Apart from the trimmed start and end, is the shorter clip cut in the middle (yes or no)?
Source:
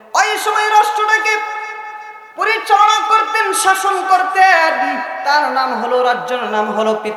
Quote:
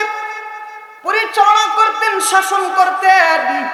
no